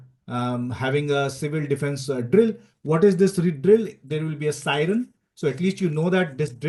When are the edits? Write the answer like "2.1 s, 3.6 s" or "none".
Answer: none